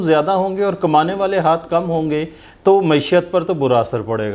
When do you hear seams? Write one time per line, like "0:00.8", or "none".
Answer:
none